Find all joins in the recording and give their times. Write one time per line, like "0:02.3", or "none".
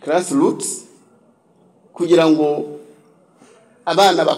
none